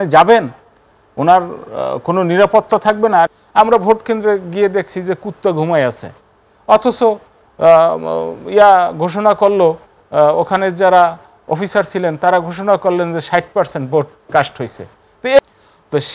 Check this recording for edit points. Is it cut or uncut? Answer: cut